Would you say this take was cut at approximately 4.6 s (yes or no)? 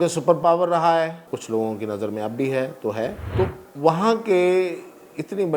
no